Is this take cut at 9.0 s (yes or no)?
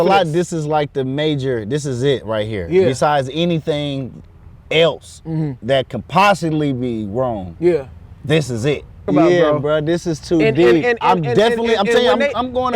yes